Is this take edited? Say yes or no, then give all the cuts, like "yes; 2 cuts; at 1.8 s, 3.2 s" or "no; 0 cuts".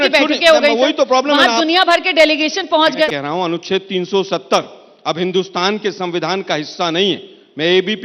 no; 0 cuts